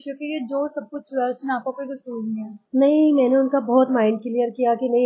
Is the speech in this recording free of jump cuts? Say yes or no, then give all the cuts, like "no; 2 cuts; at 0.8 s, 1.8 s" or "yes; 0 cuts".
no; 1 cut; at 2.6 s